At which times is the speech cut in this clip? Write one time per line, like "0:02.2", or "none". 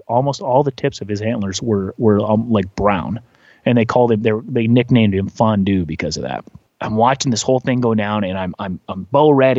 0:06.7